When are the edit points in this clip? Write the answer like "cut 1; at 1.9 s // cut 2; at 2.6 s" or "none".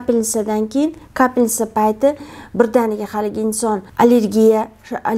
cut 1; at 3.8 s